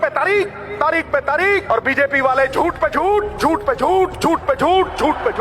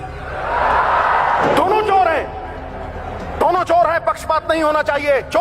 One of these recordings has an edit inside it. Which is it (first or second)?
first